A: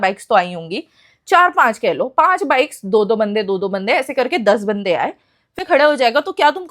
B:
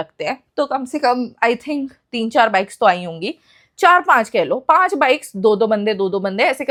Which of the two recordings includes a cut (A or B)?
A